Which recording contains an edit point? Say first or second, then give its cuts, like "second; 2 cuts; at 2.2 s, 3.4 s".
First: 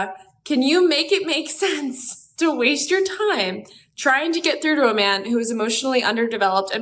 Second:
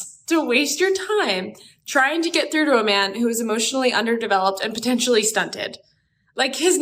second; 1 cut; at 5.9 s